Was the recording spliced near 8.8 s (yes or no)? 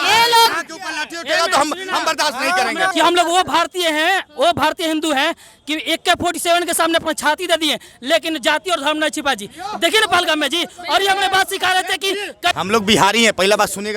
no